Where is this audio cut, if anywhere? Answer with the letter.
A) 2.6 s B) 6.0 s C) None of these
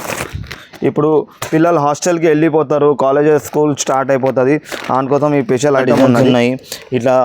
B